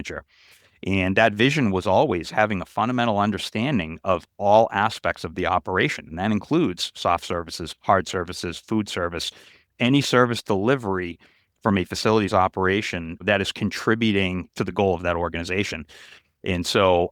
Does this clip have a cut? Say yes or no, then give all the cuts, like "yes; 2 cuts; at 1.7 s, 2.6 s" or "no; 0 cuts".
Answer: yes; 2 cuts; at 13.2 s, 14.4 s